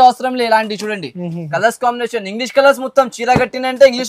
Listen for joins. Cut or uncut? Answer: uncut